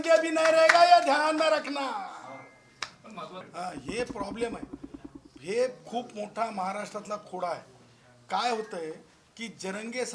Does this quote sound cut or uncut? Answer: uncut